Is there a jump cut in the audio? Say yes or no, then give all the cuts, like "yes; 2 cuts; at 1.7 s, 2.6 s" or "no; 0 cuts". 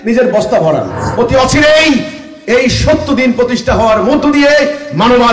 yes; 1 cut; at 1.0 s